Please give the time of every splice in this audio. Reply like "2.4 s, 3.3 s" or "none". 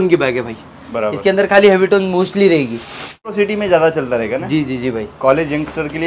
3.3 s